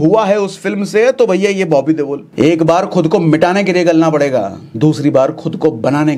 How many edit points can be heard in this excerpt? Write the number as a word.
two